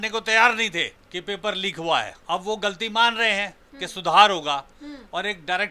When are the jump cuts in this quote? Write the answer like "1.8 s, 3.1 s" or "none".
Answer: 1.0 s, 2.2 s